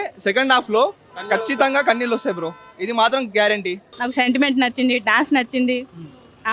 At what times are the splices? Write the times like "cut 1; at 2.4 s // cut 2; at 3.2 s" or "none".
none

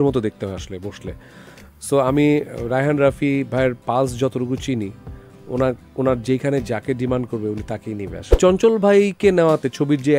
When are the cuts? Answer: cut 1; at 8.4 s

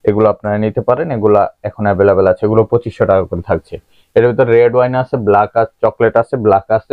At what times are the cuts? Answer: none

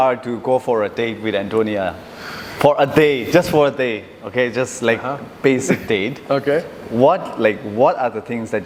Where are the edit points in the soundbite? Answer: none

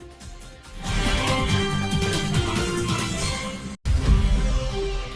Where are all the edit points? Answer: cut 1; at 3.8 s

